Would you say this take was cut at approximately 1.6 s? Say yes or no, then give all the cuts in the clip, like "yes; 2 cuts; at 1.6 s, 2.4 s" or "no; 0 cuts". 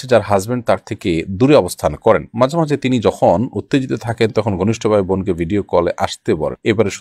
no; 0 cuts